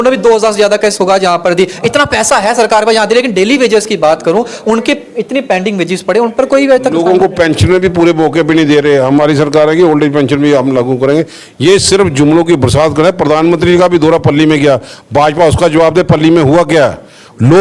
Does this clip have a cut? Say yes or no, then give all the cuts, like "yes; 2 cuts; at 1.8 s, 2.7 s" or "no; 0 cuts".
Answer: no; 0 cuts